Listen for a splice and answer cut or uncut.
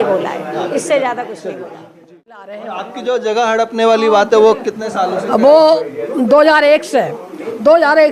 cut